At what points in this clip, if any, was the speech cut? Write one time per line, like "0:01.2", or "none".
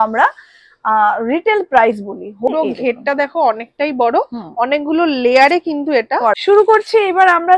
0:02.5
0:06.4